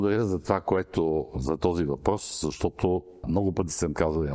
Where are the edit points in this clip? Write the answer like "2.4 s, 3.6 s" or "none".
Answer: 3.2 s